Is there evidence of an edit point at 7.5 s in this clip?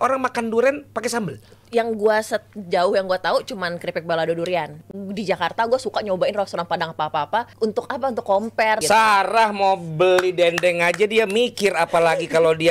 yes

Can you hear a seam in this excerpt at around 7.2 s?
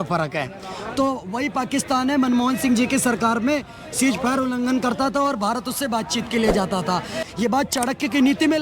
yes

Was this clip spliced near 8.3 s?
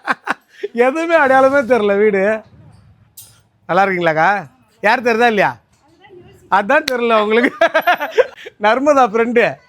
yes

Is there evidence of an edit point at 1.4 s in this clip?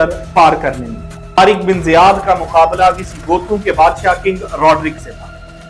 yes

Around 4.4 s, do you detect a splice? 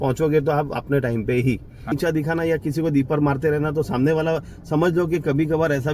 no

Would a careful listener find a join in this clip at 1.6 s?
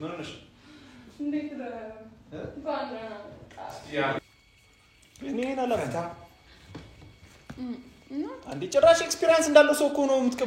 no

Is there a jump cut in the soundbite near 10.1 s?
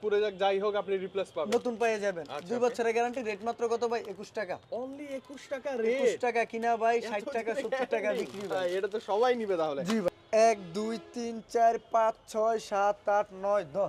yes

